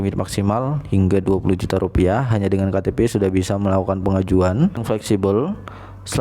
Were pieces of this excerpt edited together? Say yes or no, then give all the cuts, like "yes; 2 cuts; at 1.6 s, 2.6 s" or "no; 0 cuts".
yes; 1 cut; at 4.8 s